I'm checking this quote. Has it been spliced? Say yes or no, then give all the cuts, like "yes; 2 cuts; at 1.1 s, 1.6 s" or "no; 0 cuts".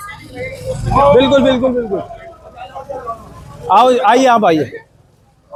no; 0 cuts